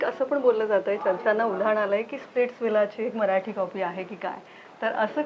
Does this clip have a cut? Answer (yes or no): no